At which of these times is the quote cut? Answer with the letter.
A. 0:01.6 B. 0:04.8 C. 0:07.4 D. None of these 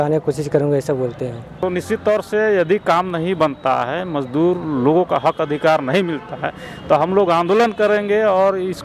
A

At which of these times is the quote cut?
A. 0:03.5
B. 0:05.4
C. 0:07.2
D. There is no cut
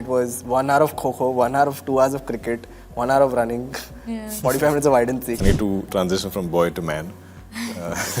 B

